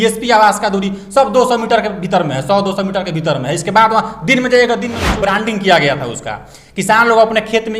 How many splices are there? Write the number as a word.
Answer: one